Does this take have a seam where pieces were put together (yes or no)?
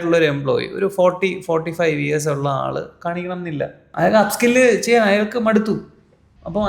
yes